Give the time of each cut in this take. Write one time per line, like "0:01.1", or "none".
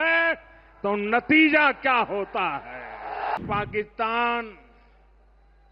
0:03.4

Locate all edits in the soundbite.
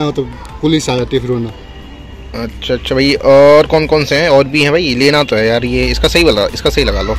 none

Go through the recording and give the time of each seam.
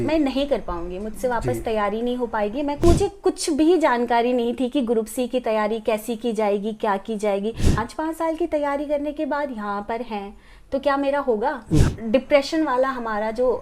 0:02.8
0:07.8
0:11.9

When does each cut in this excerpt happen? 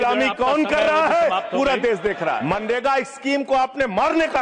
0:02.5

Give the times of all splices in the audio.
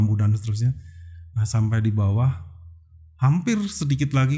none

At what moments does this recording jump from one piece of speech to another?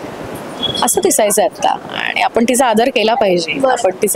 none

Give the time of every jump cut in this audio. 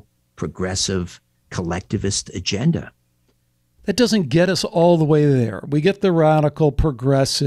0:03.8

